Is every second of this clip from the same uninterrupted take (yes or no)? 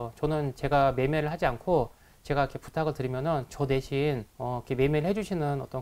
no